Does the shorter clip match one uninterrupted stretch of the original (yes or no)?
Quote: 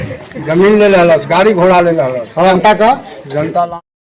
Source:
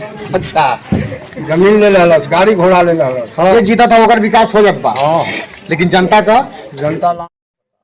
no